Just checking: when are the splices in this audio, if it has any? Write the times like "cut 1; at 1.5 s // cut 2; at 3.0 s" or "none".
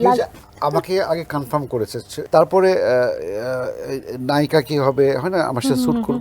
cut 1; at 2.1 s